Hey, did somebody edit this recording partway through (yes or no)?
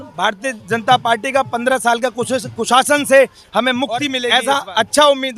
yes